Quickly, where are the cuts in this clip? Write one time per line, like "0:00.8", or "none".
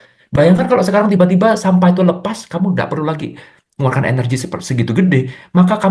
none